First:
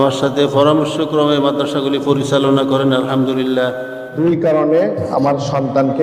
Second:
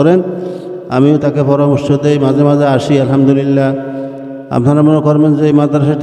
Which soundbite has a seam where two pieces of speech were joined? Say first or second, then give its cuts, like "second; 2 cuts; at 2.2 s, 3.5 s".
first; 1 cut; at 4.2 s